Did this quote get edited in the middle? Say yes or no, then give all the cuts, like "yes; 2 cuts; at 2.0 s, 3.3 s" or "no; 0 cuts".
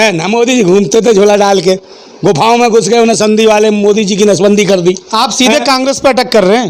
no; 0 cuts